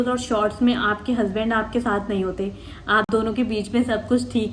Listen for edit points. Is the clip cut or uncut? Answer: uncut